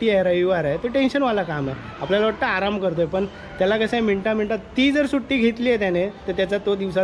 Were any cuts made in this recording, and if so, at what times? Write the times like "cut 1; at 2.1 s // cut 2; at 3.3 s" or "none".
none